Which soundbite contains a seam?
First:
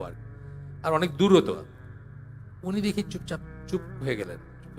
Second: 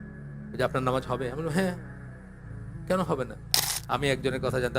second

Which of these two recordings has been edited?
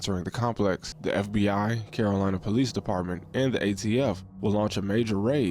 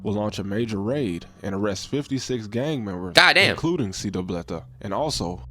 first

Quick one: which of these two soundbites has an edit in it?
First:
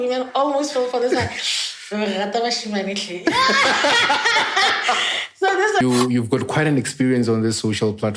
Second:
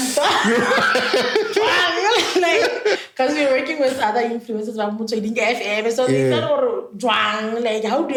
first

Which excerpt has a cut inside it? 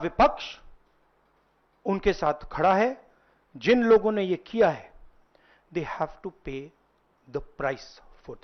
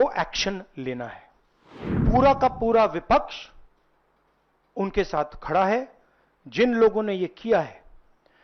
second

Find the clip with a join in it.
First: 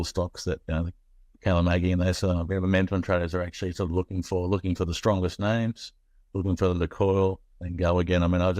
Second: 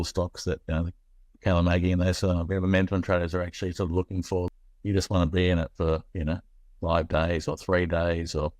second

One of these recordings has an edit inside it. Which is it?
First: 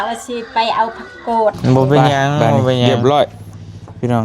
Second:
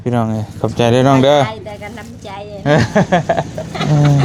first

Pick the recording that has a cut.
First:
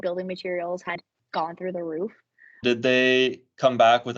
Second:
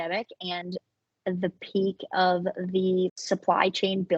first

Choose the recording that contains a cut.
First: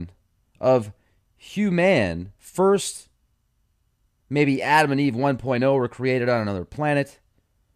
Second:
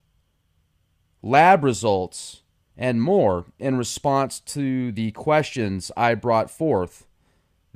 first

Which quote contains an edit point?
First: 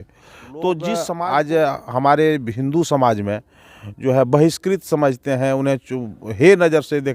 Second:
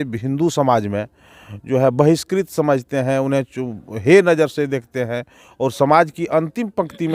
first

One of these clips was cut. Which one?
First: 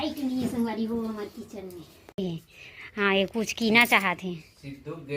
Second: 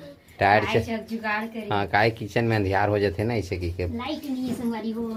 first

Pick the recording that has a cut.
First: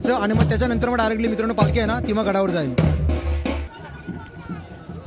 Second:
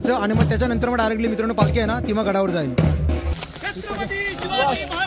second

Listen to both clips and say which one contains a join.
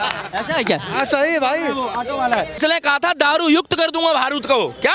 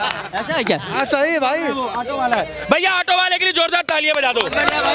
first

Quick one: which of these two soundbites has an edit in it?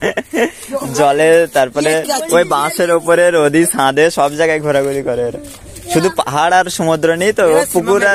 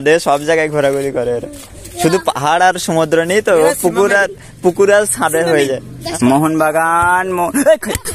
second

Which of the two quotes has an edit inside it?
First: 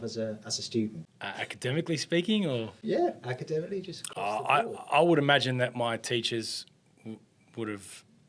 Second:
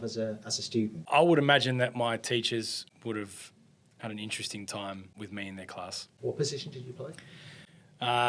second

